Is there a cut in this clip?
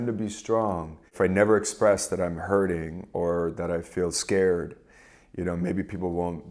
yes; 1 cut; at 1.1 s

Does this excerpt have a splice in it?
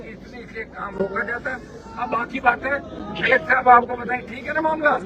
no; 0 cuts

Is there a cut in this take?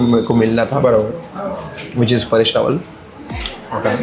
no; 0 cuts

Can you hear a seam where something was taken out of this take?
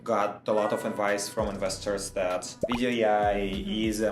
yes; 1 cut; at 2.6 s

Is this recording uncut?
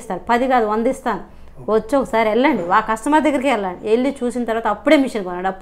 yes; 0 cuts

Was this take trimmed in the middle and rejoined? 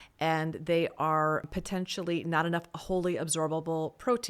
yes; 1 cut; at 1.5 s

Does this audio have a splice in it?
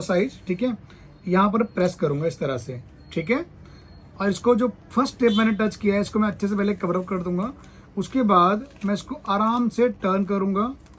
no; 0 cuts

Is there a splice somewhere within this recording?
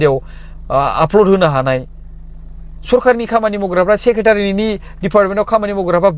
no; 0 cuts

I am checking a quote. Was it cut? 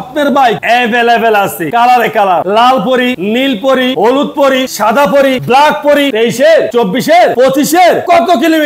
yes; 1 cut; at 6.1 s

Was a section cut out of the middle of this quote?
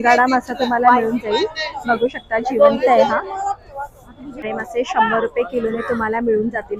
no; 0 cuts

